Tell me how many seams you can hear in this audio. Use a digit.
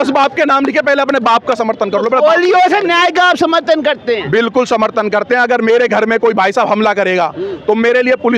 0